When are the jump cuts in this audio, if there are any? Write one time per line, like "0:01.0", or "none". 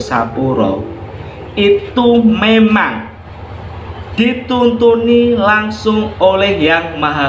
none